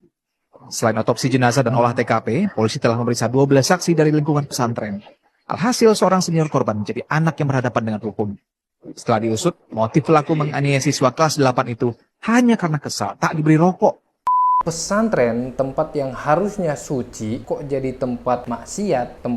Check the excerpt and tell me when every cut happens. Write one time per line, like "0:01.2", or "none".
0:14.3
0:18.5